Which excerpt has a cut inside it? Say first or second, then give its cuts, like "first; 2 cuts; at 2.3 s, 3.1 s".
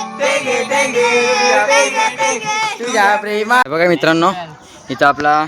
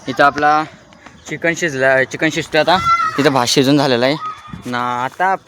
first; 1 cut; at 3.6 s